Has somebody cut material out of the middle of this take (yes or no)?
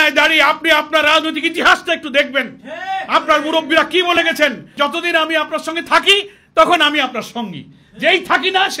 yes